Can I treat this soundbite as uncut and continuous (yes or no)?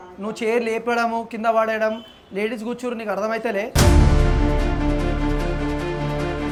yes